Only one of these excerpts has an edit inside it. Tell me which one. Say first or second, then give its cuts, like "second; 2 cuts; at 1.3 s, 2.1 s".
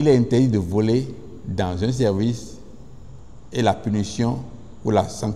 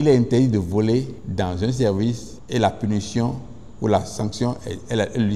second; 2 cuts; at 1.2 s, 2.3 s